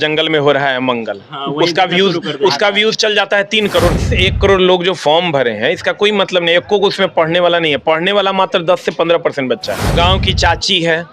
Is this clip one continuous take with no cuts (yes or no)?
no